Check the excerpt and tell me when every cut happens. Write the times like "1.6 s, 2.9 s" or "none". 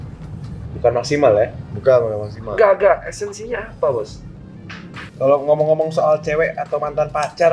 5.0 s

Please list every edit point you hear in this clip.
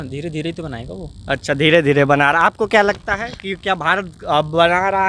none

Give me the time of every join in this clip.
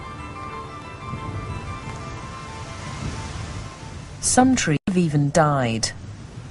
2.0 s

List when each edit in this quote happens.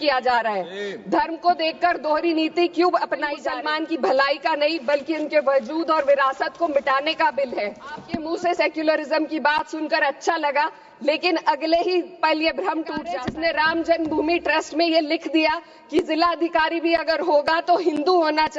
3.4 s, 8.1 s, 13.0 s

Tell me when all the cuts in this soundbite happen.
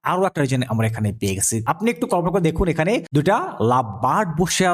1.6 s, 3.1 s

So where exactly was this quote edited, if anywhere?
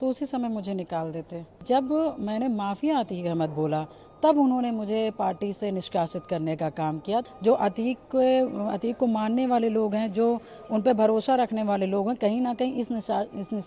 1.6 s, 7.3 s

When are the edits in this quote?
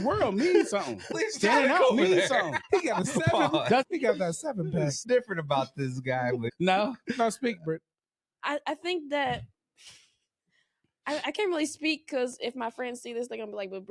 1.1 s, 2.6 s, 3.8 s, 5.0 s, 6.5 s

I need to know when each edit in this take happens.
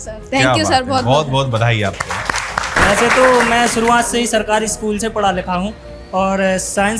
2.7 s

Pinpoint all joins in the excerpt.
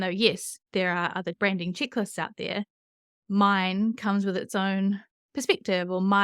1.3 s

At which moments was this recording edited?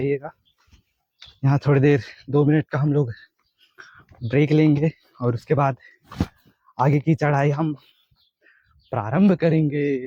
none

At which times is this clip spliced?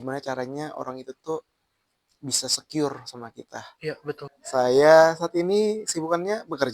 4.3 s

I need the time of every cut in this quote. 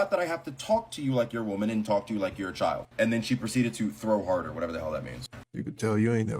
5.4 s

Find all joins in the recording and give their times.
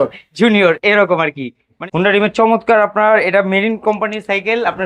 1.8 s

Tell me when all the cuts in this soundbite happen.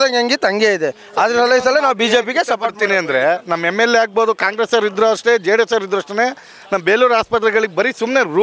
none

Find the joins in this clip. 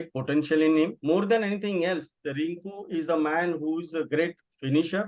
1.0 s

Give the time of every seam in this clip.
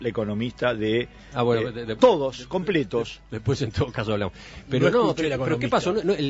1.5 s

